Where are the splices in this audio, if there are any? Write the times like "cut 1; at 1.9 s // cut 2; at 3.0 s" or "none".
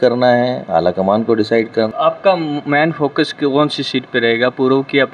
cut 1; at 1.9 s